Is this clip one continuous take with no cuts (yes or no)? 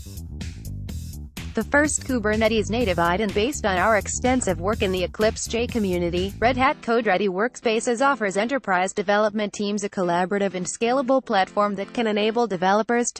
no